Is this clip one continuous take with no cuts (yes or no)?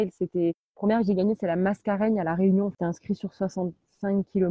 no